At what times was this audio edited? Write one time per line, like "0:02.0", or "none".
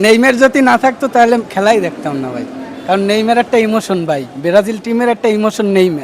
none